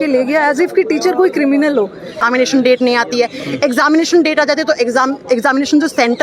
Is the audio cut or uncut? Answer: cut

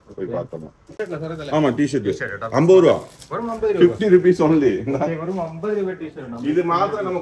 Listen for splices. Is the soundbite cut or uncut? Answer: cut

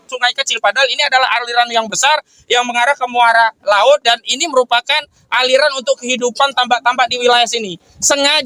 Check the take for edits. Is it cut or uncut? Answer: uncut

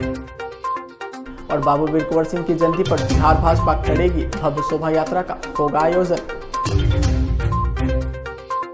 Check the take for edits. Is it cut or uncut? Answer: uncut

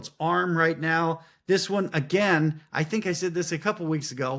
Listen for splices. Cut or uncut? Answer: uncut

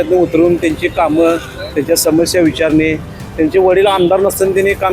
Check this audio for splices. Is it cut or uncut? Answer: uncut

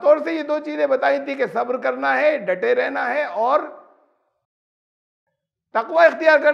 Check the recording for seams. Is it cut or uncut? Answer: uncut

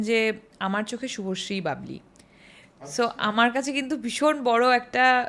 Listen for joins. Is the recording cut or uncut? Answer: uncut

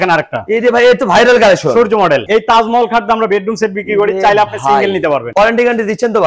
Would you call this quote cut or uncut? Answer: cut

